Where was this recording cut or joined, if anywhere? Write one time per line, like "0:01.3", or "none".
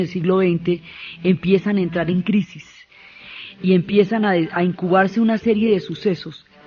0:03.1